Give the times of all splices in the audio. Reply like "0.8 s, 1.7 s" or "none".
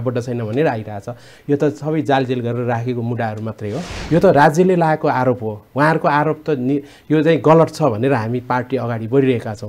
3.9 s